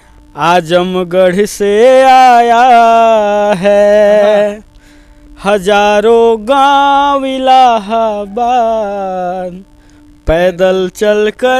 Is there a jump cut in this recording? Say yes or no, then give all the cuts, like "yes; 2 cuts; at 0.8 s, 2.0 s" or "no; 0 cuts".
no; 0 cuts